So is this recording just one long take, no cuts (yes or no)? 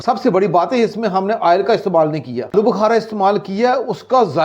no